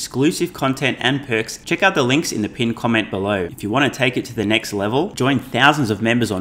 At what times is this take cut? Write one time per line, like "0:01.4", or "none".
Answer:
0:01.6
0:03.5